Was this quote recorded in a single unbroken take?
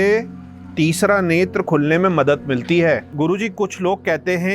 no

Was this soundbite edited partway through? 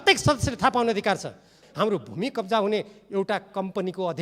yes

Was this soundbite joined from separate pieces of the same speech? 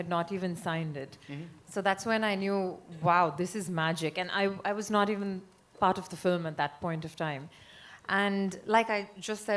no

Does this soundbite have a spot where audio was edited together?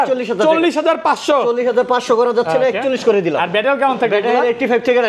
no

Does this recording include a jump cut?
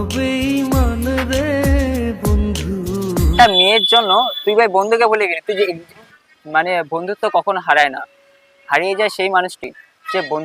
yes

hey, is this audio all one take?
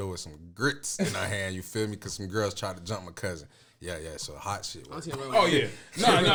yes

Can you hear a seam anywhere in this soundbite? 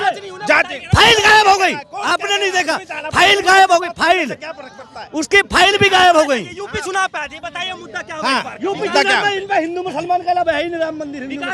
no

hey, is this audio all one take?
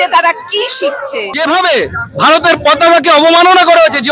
no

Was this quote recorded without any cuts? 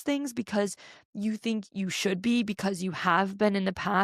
yes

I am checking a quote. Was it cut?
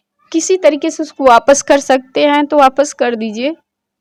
no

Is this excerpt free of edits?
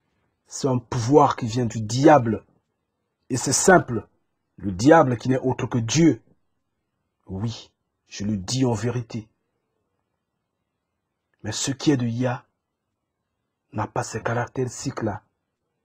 yes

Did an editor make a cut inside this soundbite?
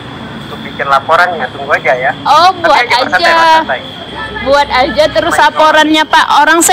no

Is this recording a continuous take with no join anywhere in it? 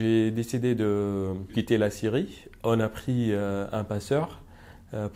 no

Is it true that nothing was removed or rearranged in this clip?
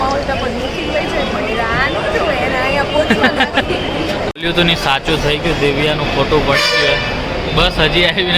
no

